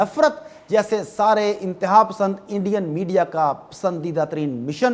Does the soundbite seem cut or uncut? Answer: uncut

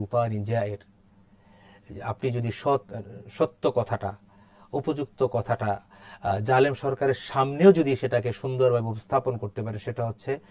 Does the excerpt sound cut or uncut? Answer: uncut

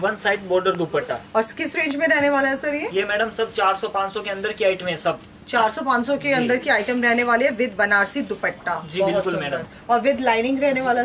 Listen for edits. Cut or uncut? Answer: uncut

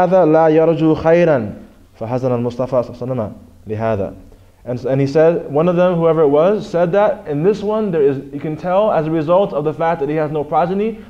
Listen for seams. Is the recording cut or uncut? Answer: cut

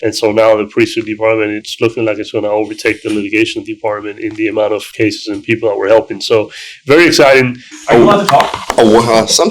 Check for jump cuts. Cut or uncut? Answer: cut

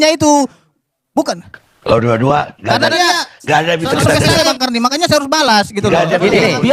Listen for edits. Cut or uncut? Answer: cut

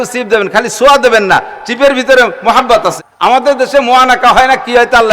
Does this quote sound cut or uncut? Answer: cut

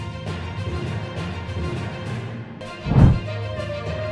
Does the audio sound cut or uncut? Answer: cut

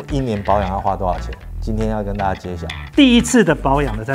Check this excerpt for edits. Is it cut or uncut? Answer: cut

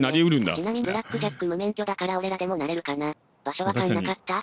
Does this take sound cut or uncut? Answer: uncut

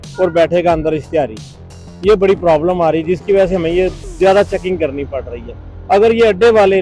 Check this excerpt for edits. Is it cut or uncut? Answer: uncut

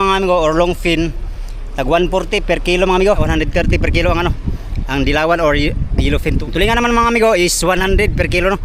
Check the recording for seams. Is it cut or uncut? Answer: cut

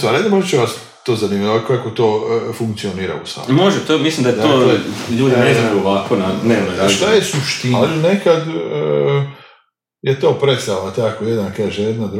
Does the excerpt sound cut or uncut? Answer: cut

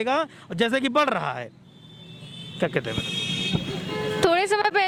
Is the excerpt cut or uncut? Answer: uncut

